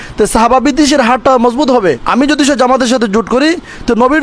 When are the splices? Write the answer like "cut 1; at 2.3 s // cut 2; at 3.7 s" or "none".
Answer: cut 1; at 2.0 s